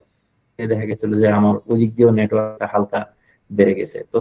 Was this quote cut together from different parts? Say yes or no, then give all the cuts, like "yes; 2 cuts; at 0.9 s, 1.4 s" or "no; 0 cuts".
no; 0 cuts